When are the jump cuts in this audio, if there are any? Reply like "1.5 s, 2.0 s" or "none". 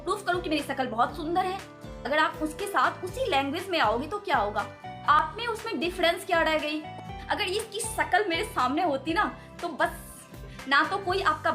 1.9 s, 5.2 s, 7.1 s, 10.3 s